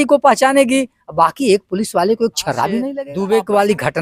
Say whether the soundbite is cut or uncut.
cut